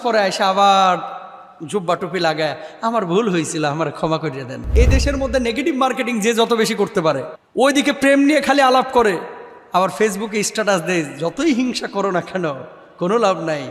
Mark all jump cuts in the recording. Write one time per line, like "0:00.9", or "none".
0:04.7